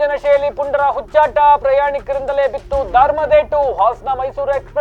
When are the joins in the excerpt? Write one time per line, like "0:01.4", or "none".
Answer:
none